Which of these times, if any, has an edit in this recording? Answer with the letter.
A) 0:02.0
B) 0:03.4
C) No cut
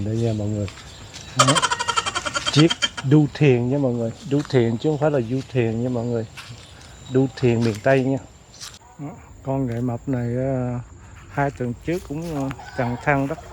C